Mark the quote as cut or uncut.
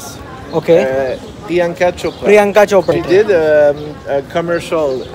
cut